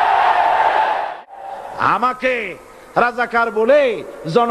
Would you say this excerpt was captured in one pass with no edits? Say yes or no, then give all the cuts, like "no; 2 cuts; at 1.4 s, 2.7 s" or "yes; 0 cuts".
no; 1 cut; at 1.2 s